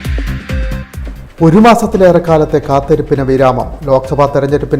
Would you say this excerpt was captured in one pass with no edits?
no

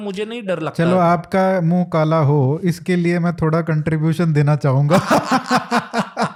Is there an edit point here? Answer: no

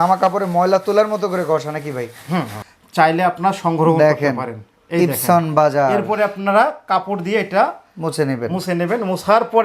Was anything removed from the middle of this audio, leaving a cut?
yes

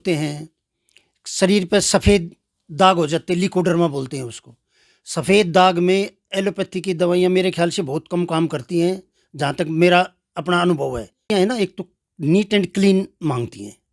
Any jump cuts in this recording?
yes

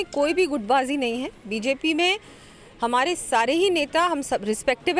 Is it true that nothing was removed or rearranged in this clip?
yes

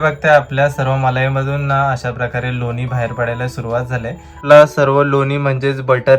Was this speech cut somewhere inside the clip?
yes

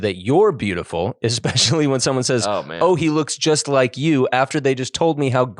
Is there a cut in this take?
no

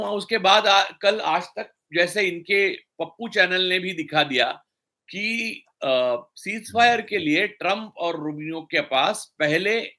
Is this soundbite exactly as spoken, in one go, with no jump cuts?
yes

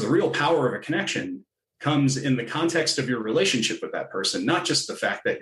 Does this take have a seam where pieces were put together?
no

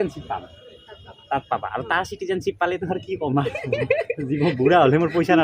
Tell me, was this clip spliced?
no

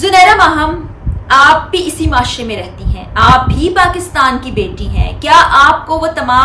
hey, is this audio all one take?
yes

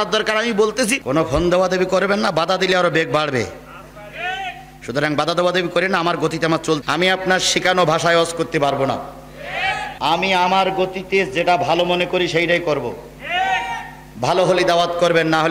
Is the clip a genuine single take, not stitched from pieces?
no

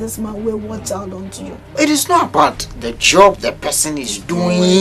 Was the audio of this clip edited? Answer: yes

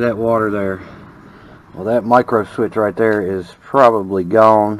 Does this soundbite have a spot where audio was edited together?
no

